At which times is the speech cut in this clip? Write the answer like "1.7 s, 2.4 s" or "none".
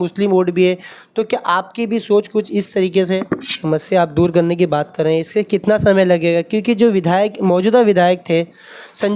3.6 s

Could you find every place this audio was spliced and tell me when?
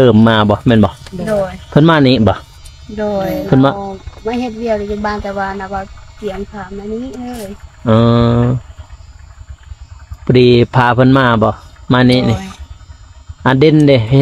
none

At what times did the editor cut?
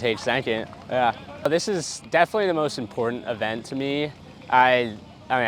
1.5 s

